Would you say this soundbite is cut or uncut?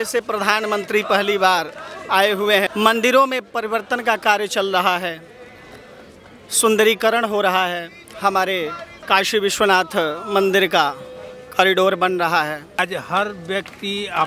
cut